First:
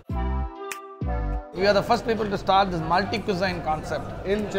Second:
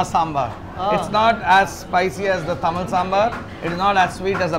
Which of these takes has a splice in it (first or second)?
first